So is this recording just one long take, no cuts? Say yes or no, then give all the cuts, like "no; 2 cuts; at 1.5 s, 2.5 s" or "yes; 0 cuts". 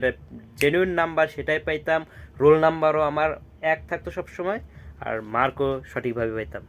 yes; 0 cuts